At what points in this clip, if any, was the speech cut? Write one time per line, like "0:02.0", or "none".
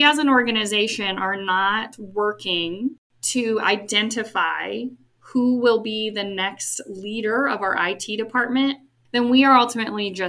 0:03.1
0:05.1
0:09.0